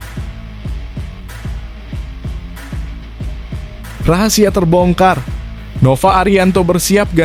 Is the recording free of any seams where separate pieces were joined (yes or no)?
yes